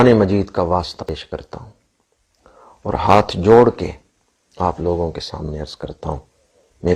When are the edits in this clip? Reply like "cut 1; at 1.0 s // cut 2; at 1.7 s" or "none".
cut 1; at 1.0 s